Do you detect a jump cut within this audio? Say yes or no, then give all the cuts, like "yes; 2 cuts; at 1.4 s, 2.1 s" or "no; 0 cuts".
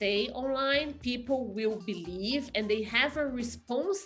no; 0 cuts